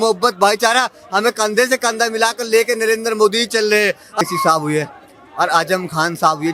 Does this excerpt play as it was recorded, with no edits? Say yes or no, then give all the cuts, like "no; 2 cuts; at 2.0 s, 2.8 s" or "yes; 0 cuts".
no; 1 cut; at 4.2 s